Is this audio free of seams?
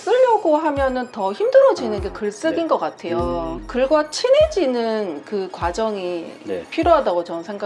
no; 1 cut; at 3.6 s

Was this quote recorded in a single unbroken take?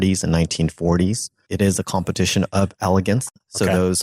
no; 1 cut; at 1.4 s

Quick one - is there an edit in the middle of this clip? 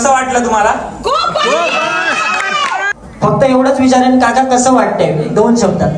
yes; 1 cut; at 2.9 s

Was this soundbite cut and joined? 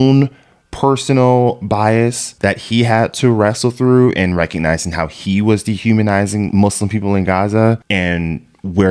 yes; 2 cuts; at 2.3 s, 6.5 s

